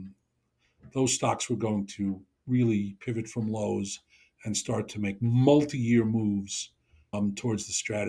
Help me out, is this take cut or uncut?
cut